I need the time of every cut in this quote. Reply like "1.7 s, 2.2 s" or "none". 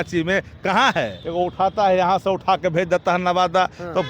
1.2 s